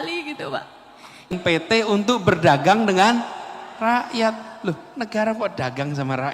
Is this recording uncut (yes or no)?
no